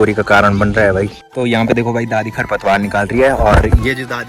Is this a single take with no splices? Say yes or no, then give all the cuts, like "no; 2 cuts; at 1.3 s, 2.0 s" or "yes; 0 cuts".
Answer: no; 1 cut; at 1.3 s